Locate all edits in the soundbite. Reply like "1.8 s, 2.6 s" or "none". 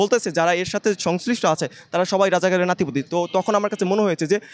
none